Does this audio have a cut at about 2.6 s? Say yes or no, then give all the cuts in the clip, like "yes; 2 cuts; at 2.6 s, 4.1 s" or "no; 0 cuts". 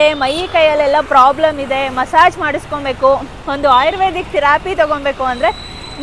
no; 0 cuts